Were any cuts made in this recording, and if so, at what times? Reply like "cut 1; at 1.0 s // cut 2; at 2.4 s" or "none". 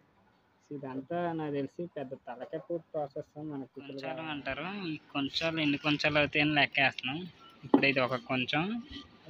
cut 1; at 4.2 s